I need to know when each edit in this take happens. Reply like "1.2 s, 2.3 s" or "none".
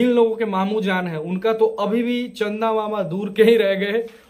none

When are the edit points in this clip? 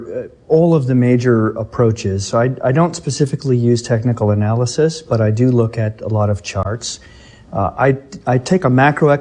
8.1 s

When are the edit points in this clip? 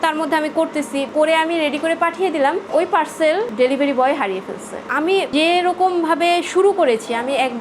1.1 s, 4.8 s

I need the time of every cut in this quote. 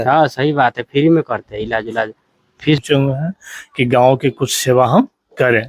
2.8 s

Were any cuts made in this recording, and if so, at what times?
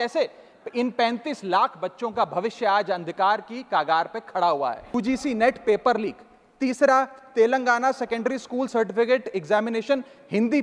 4.9 s

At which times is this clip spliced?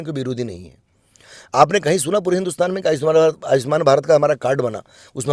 none

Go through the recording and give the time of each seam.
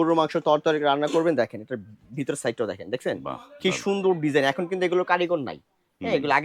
none

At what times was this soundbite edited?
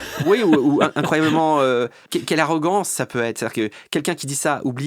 2.0 s

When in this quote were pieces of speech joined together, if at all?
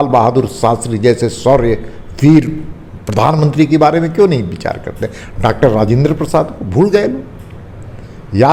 none

